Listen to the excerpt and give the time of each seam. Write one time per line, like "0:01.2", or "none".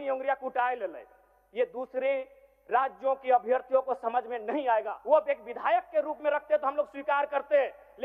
0:04.9